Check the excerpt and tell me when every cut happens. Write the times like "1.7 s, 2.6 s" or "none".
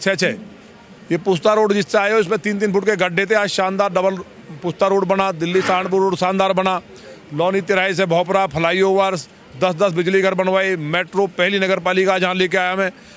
none